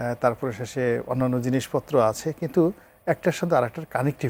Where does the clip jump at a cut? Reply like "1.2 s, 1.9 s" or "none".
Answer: none